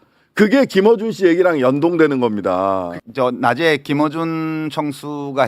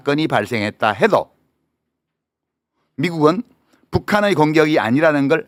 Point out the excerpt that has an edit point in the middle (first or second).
first